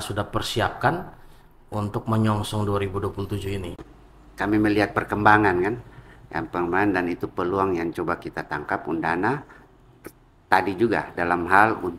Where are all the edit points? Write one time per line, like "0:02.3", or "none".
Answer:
0:03.8